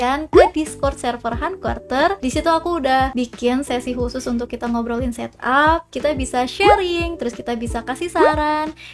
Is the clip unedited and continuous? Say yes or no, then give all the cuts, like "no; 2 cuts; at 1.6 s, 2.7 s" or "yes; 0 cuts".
no; 2 cuts; at 2.2 s, 3.1 s